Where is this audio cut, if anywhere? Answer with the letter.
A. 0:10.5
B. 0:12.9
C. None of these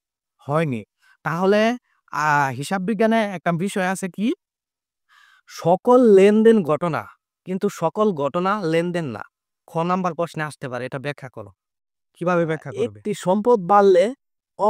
B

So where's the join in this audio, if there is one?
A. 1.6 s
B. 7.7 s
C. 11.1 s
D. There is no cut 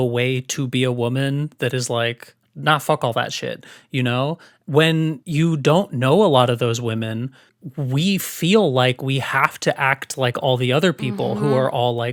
D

